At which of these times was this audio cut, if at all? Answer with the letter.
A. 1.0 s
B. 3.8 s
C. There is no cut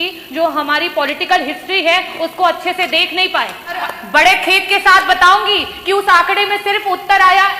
B